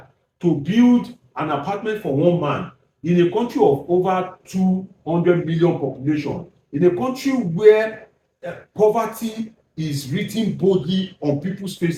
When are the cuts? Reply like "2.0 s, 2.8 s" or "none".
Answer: none